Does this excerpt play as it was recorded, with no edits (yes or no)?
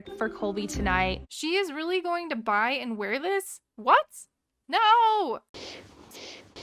no